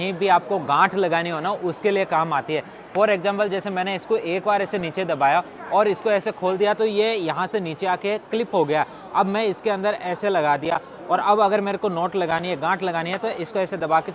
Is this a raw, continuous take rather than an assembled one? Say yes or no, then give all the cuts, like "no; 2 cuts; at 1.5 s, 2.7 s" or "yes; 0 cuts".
yes; 0 cuts